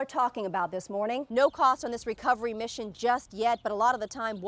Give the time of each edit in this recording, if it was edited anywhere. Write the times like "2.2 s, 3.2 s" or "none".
1.3 s

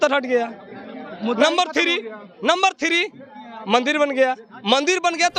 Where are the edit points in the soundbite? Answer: none

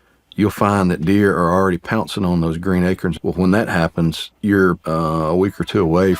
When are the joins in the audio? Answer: 3.1 s, 4.3 s, 4.8 s

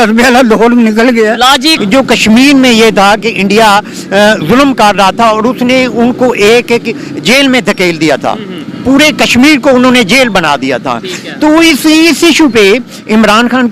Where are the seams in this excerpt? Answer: 1.8 s

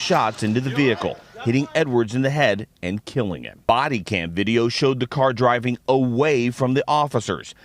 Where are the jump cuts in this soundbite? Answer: 3.6 s

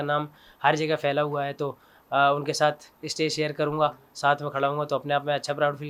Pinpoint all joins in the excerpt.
none

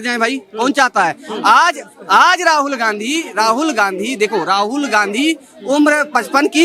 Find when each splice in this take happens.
none

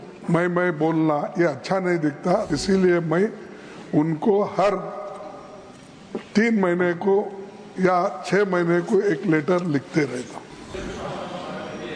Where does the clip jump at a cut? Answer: 2.5 s, 10.7 s

